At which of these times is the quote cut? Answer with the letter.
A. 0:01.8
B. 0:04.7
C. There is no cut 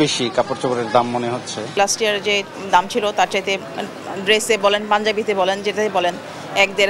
A